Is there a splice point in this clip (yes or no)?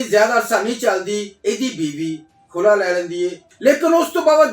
yes